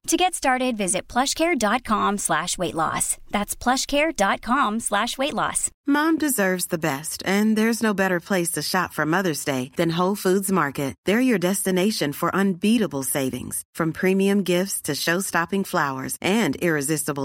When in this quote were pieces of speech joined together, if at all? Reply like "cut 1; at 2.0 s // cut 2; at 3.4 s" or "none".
cut 1; at 5.7 s